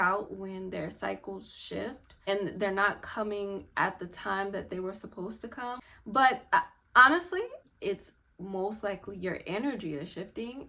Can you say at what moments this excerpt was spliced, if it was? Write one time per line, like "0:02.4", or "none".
0:02.1
0:05.8
0:07.6